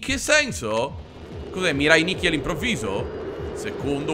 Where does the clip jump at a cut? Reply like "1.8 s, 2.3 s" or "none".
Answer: none